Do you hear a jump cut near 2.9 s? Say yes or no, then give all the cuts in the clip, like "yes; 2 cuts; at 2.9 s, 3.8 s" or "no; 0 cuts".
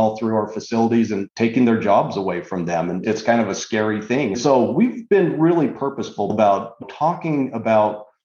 no; 2 cuts; at 4.4 s, 6.3 s